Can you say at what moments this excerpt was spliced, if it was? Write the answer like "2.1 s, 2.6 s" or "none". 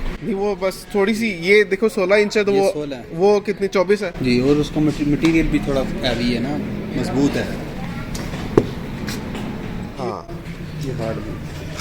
9.9 s